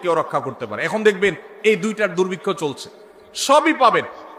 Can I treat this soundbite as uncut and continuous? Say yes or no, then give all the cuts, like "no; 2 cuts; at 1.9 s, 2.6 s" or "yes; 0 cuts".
yes; 0 cuts